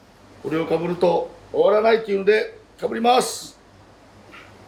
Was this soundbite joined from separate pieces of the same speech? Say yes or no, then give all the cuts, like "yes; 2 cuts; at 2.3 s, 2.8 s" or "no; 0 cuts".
no; 0 cuts